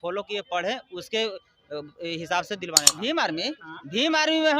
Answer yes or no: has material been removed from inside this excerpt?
yes